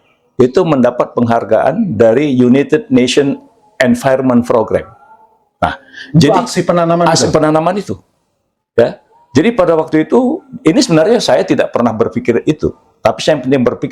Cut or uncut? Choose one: uncut